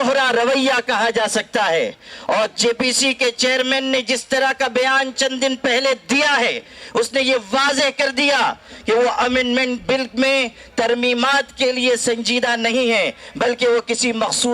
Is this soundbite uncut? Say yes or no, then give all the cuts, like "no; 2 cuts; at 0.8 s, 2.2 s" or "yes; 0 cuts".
yes; 0 cuts